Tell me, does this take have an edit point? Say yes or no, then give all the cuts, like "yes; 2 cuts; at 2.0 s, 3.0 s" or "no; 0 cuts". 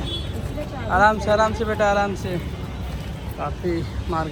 no; 0 cuts